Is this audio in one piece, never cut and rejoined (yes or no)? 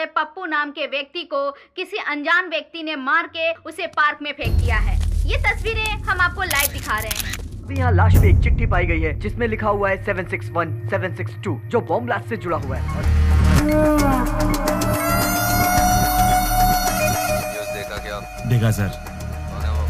no